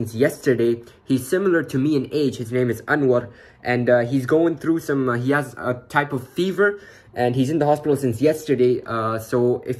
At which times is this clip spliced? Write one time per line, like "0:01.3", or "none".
none